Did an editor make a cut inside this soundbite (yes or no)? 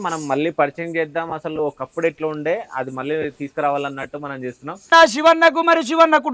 yes